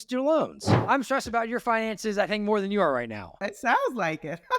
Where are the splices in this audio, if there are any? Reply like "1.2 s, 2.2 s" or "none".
0.8 s, 3.4 s